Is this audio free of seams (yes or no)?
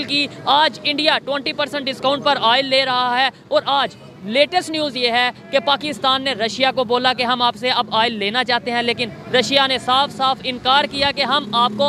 yes